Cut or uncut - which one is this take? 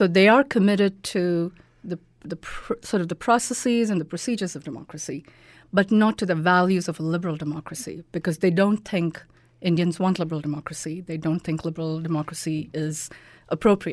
uncut